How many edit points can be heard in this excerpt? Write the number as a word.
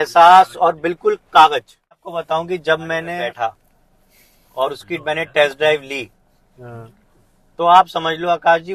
two